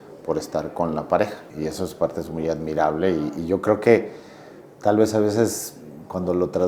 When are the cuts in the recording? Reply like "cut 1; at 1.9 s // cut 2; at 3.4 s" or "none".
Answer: cut 1; at 1.4 s